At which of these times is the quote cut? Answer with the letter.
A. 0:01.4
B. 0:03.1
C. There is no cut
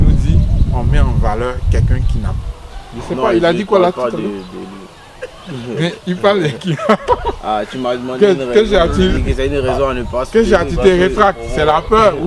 C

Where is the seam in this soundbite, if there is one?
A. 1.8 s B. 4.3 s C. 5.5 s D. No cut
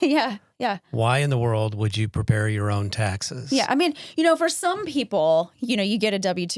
D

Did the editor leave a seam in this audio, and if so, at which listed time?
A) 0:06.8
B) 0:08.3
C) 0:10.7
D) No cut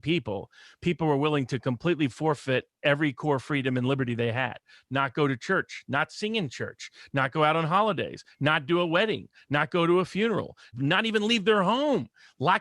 C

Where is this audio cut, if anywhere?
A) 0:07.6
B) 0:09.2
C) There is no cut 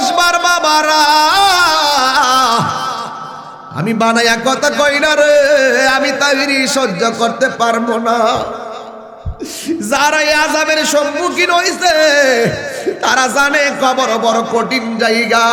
C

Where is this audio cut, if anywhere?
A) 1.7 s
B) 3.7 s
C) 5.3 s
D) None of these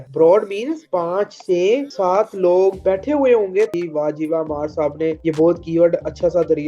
B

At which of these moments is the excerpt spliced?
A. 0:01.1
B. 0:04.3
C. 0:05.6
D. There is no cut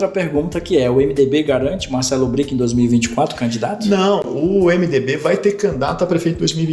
D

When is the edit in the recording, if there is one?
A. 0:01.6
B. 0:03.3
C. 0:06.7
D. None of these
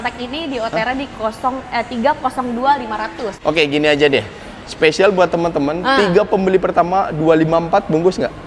B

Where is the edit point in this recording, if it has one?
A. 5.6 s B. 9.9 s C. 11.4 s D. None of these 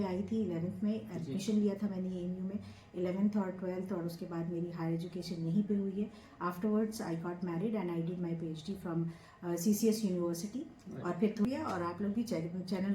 C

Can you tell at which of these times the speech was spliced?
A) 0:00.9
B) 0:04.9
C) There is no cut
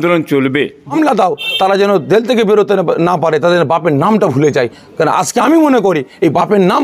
A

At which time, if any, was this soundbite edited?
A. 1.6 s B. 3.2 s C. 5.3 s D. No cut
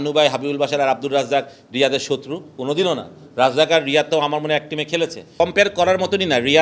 C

